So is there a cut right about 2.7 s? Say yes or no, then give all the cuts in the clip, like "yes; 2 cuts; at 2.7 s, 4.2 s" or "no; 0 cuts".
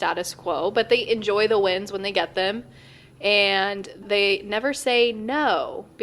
no; 1 cut; at 4.0 s